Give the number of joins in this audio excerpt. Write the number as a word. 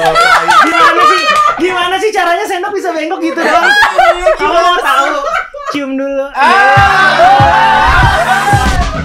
zero